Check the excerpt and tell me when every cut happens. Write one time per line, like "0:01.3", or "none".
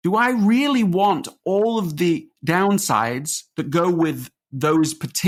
none